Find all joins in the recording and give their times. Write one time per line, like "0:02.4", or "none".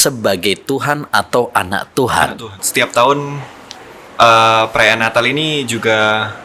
0:02.6